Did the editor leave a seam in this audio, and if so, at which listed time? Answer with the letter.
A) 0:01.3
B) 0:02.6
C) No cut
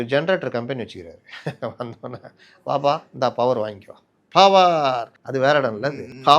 C